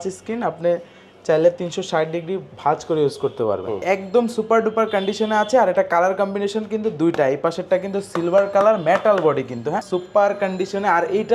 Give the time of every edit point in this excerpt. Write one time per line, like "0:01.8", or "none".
0:03.8
0:09.8